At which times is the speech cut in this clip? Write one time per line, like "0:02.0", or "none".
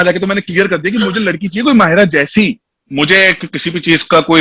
0:02.7